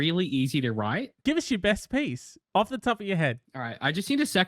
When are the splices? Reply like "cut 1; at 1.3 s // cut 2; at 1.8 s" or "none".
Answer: cut 1; at 1.2 s // cut 2; at 3.4 s